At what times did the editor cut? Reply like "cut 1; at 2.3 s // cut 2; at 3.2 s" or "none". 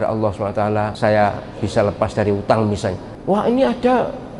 cut 1; at 0.9 s // cut 2; at 3.1 s